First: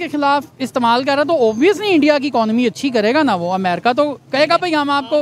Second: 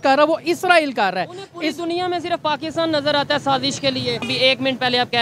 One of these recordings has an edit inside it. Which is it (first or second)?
second